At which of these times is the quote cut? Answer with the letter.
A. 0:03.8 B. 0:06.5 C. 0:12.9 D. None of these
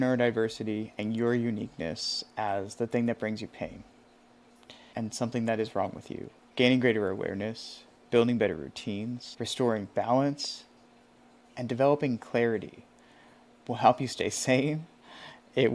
D